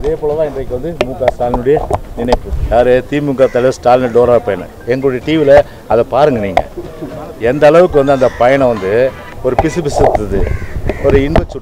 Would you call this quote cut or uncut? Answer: cut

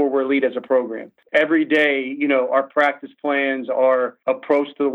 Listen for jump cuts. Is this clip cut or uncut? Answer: cut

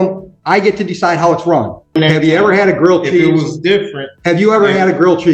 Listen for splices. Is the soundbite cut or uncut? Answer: cut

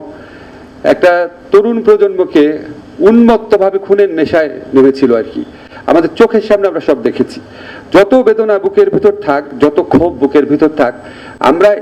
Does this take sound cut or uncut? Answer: uncut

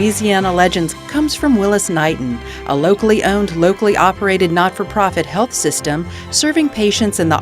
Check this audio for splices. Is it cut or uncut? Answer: cut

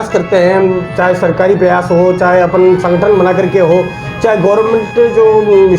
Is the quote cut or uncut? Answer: uncut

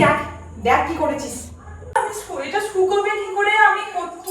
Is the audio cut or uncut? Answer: cut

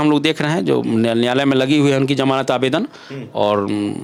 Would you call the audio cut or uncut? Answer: uncut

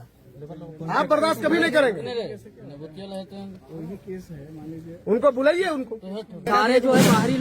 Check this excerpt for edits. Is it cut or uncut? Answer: cut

